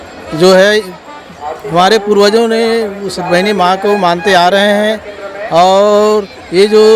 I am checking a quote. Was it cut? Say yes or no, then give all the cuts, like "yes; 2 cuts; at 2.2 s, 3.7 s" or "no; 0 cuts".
no; 0 cuts